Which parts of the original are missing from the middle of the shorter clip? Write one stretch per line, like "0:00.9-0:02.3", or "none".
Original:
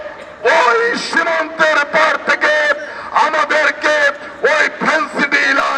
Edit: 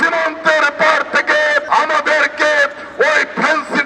0:02.8-0:03.1